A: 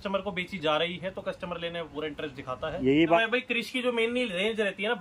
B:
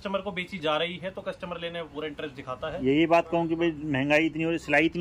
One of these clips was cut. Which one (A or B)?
A